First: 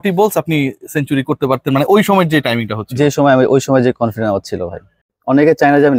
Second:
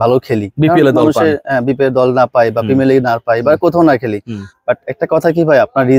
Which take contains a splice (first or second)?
first